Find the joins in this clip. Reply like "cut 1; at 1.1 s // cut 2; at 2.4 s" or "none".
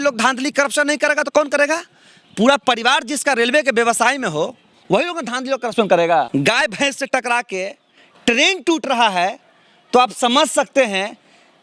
cut 1; at 6.3 s